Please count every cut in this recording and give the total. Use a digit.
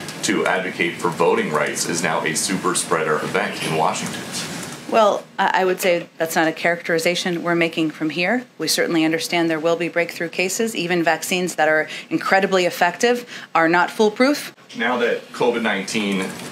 1